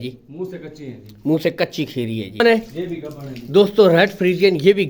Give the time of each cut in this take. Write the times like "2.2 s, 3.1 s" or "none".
2.4 s